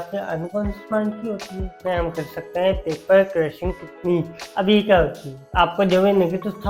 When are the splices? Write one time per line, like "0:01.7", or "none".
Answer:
0:01.7